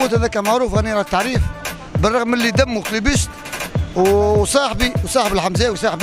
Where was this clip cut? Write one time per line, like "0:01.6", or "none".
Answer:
none